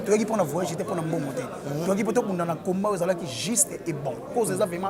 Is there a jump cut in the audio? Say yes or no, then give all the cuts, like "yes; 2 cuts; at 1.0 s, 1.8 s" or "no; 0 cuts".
no; 0 cuts